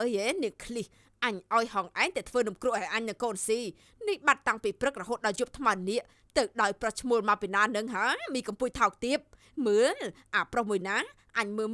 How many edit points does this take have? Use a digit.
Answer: 0